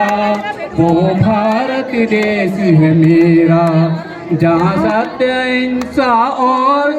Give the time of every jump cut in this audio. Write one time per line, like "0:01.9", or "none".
none